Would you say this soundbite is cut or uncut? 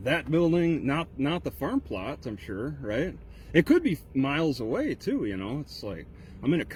uncut